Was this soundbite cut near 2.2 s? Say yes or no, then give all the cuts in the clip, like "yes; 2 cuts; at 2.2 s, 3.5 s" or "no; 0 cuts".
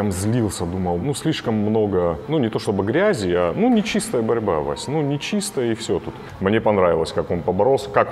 yes; 3 cuts; at 1.0 s, 2.2 s, 6.2 s